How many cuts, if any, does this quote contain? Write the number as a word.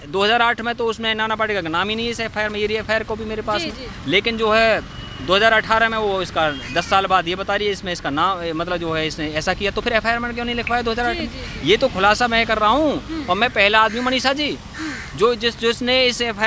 zero